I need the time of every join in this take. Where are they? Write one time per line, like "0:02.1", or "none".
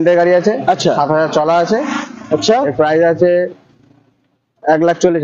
none